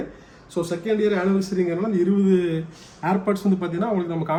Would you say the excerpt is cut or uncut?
uncut